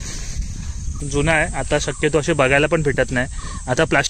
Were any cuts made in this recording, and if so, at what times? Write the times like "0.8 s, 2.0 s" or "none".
0.9 s